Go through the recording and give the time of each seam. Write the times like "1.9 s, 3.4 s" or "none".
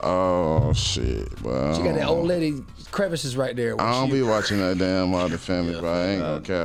none